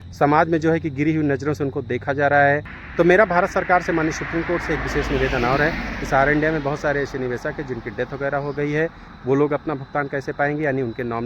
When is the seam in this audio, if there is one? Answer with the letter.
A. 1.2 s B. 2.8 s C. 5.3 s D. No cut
B